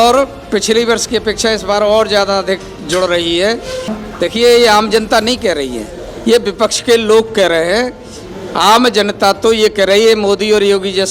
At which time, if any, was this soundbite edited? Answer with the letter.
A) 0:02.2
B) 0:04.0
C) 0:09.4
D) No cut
B